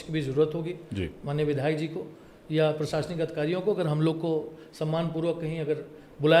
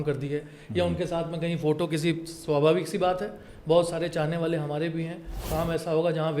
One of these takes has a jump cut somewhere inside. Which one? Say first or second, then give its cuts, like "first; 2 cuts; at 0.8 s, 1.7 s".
second; 1 cut; at 5.4 s